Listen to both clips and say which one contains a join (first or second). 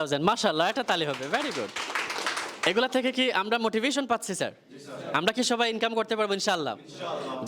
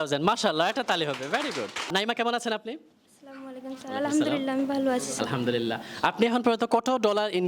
second